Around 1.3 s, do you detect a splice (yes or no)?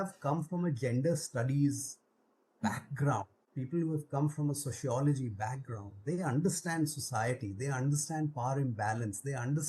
no